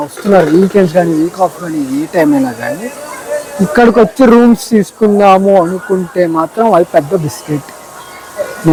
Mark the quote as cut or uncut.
uncut